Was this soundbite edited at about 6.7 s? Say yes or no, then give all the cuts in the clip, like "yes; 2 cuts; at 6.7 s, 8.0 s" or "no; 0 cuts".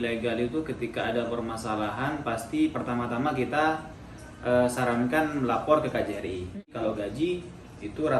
yes; 1 cut; at 6.7 s